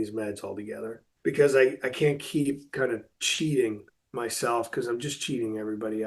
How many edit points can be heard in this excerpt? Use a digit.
1